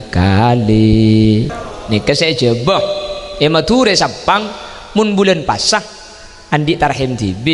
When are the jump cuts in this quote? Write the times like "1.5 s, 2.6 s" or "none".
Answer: 1.5 s